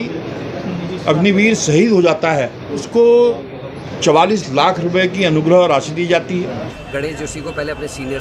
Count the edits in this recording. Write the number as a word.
two